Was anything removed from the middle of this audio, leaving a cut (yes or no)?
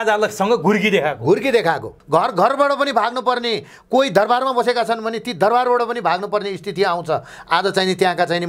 yes